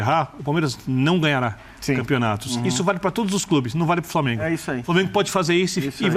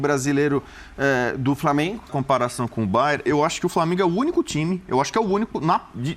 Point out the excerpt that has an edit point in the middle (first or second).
second